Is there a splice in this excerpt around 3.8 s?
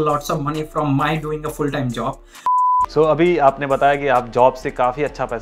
no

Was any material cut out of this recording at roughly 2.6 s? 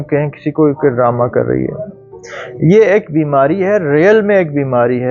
no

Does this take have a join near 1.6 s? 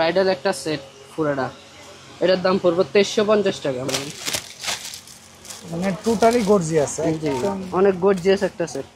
no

